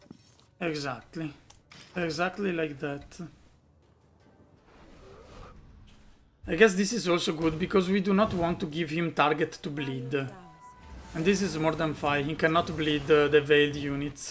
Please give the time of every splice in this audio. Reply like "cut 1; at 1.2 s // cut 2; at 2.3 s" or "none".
cut 1; at 3.8 s